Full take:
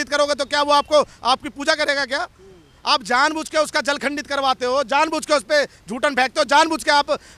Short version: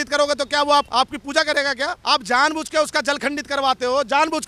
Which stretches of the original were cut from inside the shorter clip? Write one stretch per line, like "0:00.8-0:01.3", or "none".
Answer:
0:00.9-0:01.2
0:02.3-0:02.8